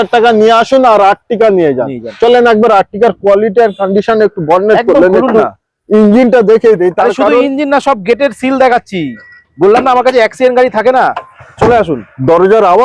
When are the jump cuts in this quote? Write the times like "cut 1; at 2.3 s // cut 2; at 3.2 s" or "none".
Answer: none